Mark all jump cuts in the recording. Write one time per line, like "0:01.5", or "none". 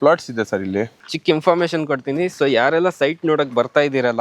0:01.0

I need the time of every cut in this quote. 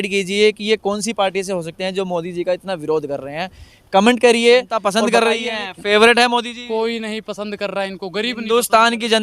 0:04.9

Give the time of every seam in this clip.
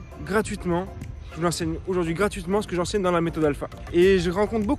0:03.7

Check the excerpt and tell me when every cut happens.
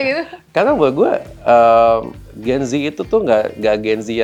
none

